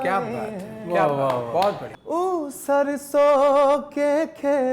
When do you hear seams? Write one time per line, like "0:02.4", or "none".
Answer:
0:01.8